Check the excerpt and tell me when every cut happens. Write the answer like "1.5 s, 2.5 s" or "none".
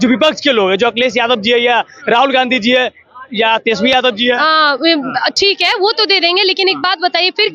none